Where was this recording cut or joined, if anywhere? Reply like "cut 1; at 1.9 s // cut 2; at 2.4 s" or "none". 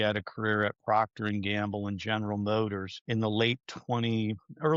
cut 1; at 2.9 s